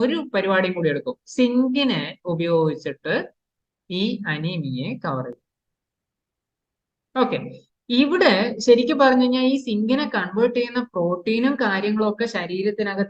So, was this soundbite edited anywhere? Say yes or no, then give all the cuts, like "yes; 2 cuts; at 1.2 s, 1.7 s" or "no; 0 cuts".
no; 0 cuts